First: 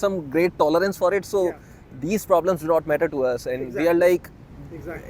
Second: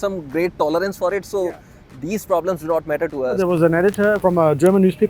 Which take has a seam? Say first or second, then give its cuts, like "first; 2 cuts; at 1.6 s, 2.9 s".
second; 2 cuts; at 3.3 s, 4.2 s